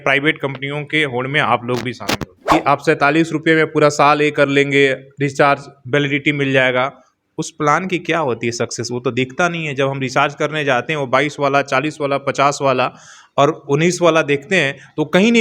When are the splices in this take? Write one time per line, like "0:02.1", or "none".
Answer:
0:02.3